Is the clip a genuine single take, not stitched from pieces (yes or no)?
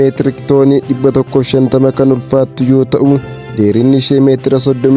no